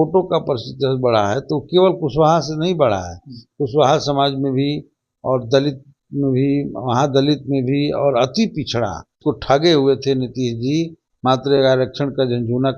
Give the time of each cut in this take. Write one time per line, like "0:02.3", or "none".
0:09.1